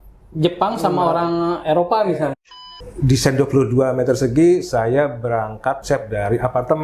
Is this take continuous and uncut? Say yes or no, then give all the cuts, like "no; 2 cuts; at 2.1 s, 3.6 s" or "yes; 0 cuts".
no; 2 cuts; at 2.4 s, 5.8 s